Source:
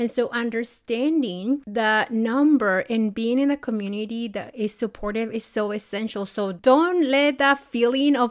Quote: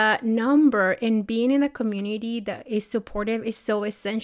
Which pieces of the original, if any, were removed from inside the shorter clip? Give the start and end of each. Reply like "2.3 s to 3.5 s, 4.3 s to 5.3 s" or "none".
none